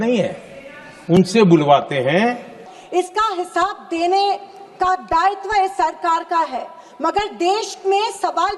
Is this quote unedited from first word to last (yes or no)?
no